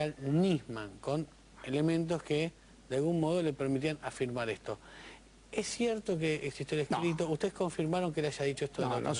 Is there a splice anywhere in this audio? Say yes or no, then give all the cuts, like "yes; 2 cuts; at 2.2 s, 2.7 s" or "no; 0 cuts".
no; 0 cuts